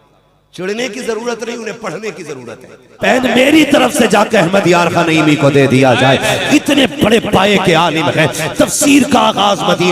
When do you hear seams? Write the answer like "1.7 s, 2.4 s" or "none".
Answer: 3.0 s